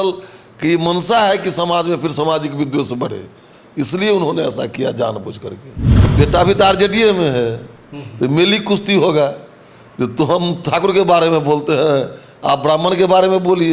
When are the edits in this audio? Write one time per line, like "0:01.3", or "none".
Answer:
0:05.8